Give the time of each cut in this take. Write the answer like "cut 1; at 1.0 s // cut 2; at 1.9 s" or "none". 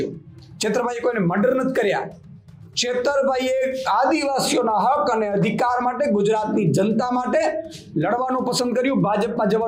none